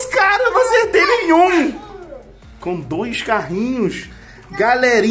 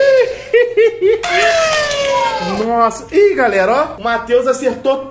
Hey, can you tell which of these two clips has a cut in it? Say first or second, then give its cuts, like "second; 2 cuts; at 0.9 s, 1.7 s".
second; 1 cut; at 4.0 s